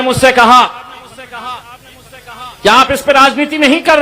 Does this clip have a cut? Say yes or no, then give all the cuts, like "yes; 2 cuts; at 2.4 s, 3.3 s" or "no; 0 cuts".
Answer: no; 0 cuts